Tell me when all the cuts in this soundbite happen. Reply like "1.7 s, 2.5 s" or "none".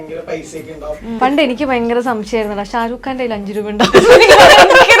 1.1 s